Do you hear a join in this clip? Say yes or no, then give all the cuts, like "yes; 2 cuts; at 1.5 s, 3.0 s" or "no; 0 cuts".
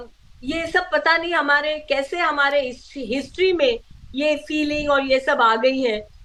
no; 0 cuts